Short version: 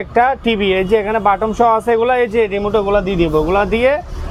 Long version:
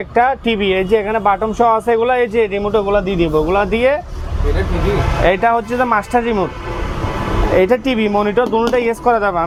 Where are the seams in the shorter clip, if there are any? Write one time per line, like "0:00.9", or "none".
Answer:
none